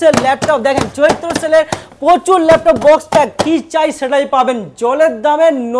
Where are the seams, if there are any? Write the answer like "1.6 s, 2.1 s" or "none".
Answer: none